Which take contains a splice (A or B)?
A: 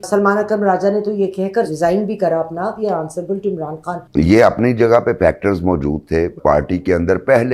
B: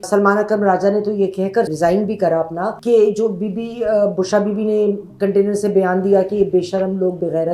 A